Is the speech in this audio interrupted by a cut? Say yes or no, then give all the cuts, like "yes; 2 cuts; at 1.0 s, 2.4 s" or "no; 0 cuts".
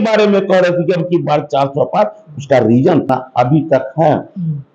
yes; 1 cut; at 3.1 s